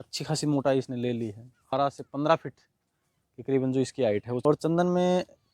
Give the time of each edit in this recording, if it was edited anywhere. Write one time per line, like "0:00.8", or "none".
0:01.7
0:04.4